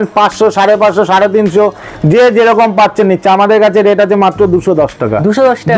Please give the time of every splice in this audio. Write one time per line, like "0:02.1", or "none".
none